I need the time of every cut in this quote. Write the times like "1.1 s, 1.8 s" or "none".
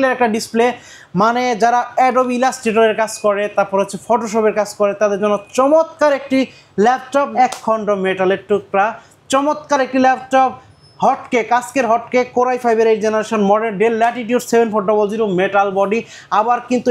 7.3 s